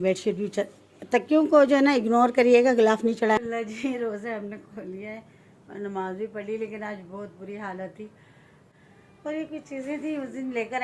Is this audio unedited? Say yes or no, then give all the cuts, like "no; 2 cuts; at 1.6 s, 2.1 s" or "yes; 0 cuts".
no; 2 cuts; at 3.4 s, 8.7 s